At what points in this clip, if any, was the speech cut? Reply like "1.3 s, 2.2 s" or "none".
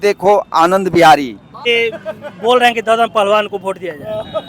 1.7 s